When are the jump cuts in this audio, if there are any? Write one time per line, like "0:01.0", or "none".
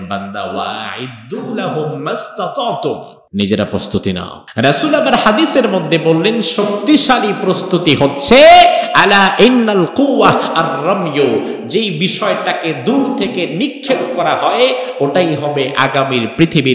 0:03.1
0:04.4